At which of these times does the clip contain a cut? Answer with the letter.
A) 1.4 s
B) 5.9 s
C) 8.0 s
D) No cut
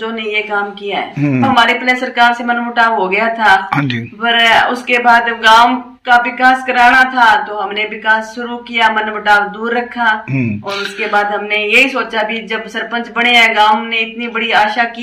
A